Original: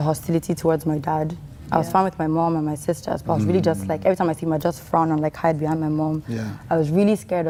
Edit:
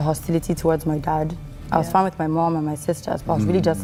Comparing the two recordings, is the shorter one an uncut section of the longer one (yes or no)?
yes